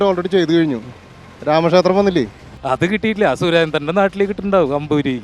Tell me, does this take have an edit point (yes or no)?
yes